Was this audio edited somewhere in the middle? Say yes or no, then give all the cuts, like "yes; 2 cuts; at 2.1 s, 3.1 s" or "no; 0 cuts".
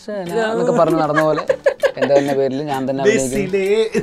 no; 0 cuts